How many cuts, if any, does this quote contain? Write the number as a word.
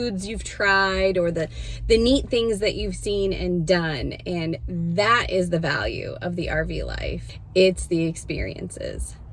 one